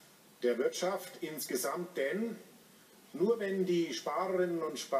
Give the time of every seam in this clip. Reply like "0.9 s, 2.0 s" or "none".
1.2 s